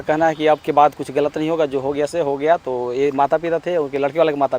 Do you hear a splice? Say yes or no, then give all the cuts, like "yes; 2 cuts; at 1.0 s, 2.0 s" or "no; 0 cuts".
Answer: no; 0 cuts